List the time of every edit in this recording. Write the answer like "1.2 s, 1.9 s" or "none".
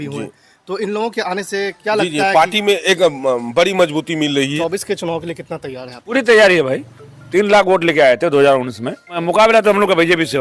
4.5 s, 6.1 s, 7.2 s, 9.1 s

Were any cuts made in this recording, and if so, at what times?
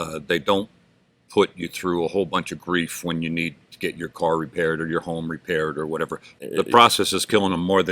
6.3 s

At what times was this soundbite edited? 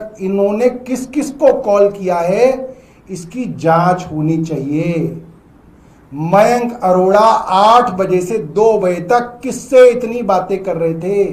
none

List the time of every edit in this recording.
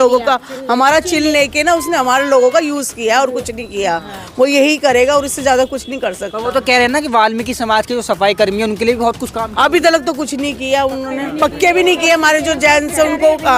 none

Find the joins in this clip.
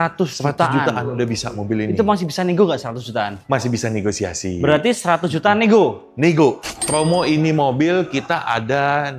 6.7 s

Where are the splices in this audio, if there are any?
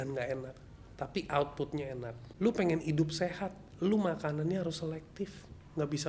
2.2 s

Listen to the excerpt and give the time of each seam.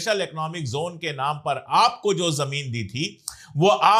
none

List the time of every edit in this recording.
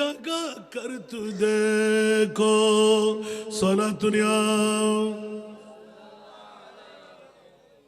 none

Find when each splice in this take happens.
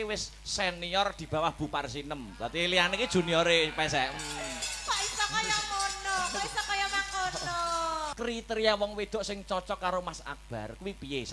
8.1 s

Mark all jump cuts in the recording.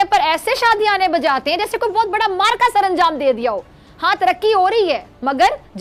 none

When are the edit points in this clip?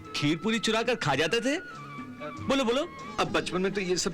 3.0 s

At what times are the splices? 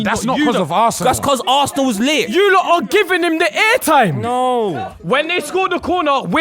1.0 s, 2.3 s, 4.7 s

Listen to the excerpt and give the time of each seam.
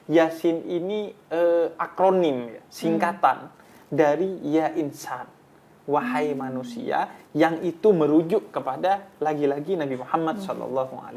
none

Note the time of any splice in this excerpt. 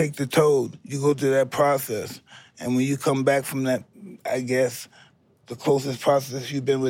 none

